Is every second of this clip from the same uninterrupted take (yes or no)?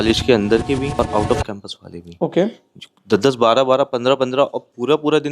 no